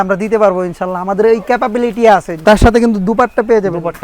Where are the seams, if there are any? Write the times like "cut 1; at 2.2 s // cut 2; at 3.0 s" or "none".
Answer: cut 1; at 2.4 s